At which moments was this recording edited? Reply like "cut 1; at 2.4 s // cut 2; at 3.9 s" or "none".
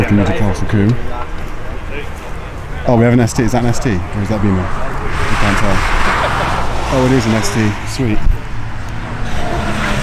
none